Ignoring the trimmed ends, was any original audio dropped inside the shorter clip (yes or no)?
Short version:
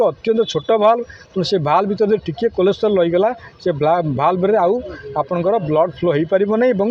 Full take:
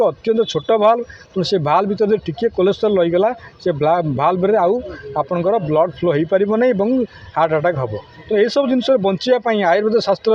no